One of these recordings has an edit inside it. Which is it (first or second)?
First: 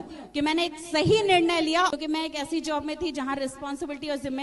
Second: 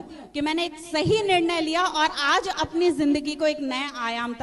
first